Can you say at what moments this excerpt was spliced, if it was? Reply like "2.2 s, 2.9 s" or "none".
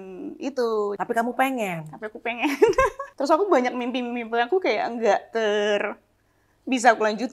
1.0 s, 3.0 s